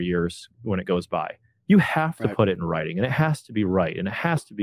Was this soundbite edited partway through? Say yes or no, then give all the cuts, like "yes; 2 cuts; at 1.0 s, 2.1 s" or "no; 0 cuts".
no; 0 cuts